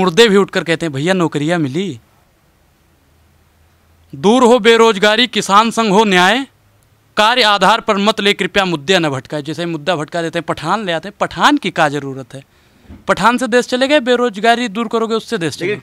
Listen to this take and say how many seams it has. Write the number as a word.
zero